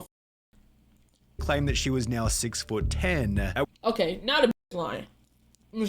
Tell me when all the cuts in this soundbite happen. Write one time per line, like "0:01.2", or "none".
0:04.7